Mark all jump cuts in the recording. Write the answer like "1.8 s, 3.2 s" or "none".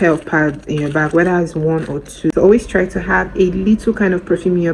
2.3 s